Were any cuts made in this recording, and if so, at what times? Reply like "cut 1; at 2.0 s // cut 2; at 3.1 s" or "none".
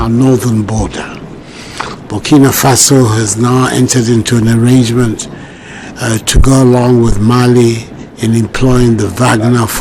none